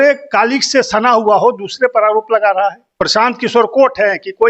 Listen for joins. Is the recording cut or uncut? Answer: cut